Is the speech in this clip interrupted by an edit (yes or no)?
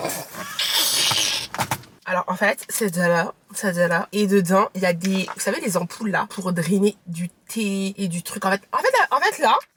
no